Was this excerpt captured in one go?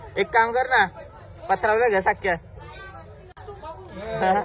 yes; 0 cuts

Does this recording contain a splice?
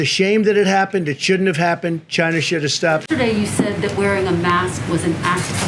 yes; 1 cut; at 3.0 s

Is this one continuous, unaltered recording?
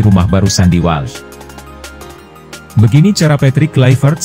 no; 2 cuts; at 1.1 s, 2.7 s

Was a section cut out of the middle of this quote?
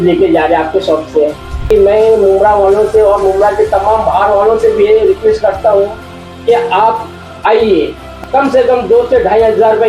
yes; 2 cuts; at 1.7 s, 8.0 s

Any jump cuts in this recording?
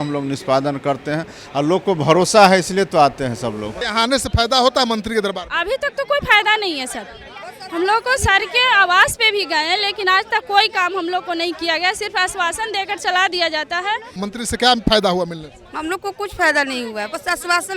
yes; 2 cuts; at 3.8 s, 14.1 s

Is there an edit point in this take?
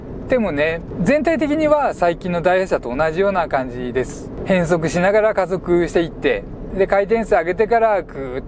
yes; 2 cuts; at 0.9 s, 4.3 s

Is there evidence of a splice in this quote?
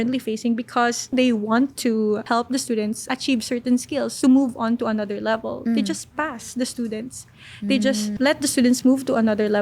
yes; 2 cuts; at 1.1 s, 4.1 s

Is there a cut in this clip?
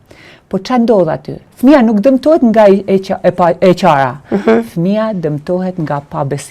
yes; 1 cut; at 1.4 s

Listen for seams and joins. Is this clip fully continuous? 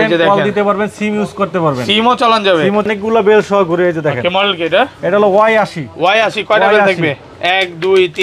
no; 1 cut; at 2.9 s

